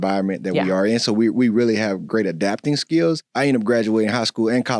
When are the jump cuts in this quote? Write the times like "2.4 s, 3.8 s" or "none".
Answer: 3.3 s